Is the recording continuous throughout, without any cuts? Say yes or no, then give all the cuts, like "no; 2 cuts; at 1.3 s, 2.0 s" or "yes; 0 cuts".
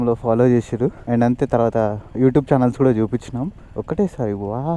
no; 2 cuts; at 1.0 s, 3.7 s